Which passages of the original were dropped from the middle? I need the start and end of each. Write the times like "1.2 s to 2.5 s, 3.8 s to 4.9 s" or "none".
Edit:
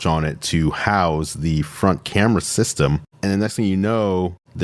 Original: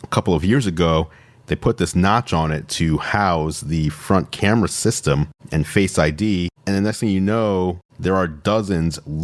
5.4 s to 6.5 s